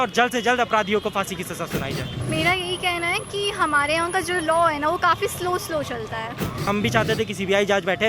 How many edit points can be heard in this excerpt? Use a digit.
1